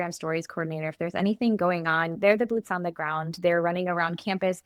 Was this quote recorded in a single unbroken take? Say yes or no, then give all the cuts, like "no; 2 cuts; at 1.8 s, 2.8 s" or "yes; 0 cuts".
yes; 0 cuts